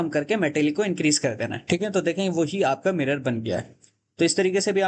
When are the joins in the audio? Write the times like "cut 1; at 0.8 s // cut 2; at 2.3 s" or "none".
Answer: none